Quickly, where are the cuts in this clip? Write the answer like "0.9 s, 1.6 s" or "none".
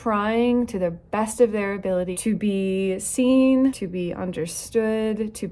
2.1 s, 3.8 s